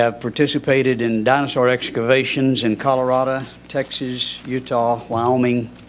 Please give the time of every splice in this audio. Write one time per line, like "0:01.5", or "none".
0:02.7

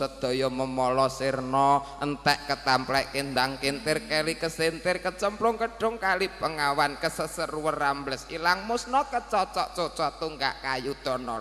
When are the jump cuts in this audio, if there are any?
none

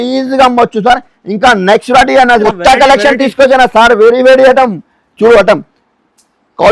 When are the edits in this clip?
0:02.4

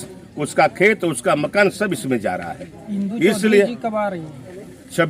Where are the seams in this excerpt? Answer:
none

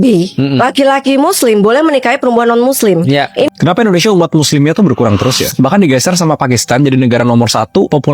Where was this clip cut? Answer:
0:03.5

